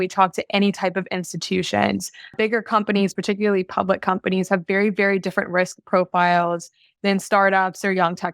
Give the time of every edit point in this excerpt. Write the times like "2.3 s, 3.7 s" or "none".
2.3 s

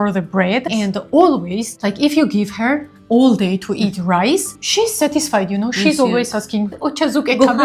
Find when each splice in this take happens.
none

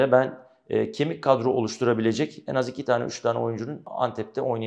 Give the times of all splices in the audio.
none

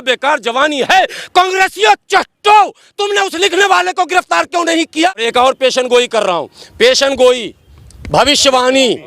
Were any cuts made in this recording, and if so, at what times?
5.2 s

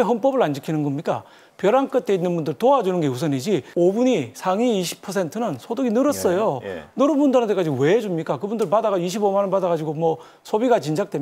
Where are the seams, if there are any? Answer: 1.4 s, 3.7 s

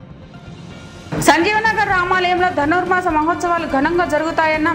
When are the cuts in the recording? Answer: none

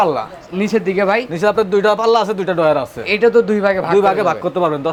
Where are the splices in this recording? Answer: none

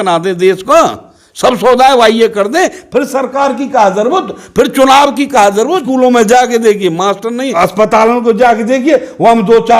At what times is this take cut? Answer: 5.8 s, 7.6 s

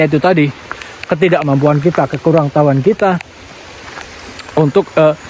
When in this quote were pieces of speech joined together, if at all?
none

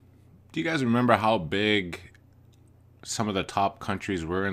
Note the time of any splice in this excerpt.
none

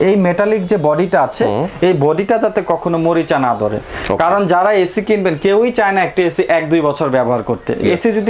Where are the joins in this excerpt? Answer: none

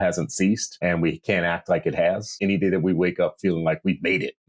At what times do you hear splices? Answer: 0.8 s, 2.4 s

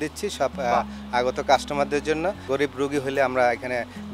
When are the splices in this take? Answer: 2.4 s

